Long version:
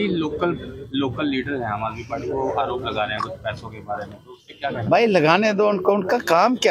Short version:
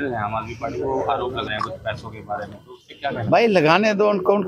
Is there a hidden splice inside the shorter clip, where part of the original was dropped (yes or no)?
yes